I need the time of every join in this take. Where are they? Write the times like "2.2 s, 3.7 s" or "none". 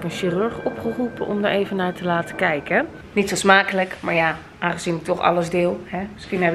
3.0 s